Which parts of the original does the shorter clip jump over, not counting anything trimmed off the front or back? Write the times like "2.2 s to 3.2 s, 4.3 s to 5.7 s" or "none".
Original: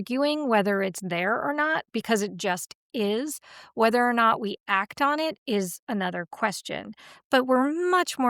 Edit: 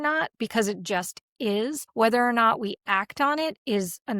3.4 s to 3.6 s